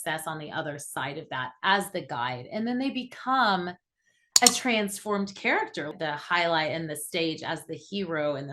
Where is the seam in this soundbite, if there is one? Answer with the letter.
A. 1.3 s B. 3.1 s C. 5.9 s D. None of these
C